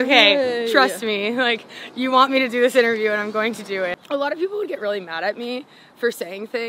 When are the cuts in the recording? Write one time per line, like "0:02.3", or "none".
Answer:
0:04.0